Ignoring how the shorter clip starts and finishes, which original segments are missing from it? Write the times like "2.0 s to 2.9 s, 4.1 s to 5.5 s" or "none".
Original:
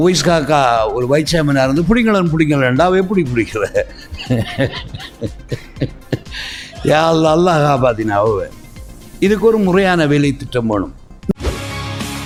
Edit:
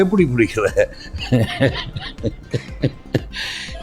none